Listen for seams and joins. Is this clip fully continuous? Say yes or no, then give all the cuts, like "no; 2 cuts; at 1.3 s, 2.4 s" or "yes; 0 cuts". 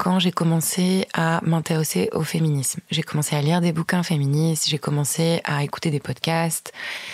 yes; 0 cuts